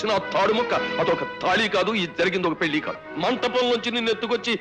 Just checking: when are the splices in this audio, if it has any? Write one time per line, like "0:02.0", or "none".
0:03.0